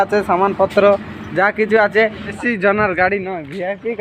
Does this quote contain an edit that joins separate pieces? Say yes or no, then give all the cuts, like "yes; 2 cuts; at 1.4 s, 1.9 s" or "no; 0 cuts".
yes; 1 cut; at 2.4 s